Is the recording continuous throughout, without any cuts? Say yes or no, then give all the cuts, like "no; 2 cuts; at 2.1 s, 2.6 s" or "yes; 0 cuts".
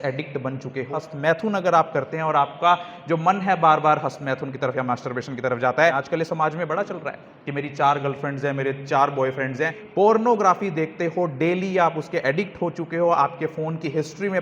no; 3 cuts; at 0.9 s, 6.2 s, 10.0 s